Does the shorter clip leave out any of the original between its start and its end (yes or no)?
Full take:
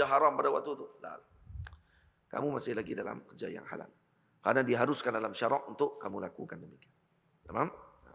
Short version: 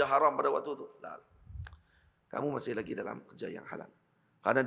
no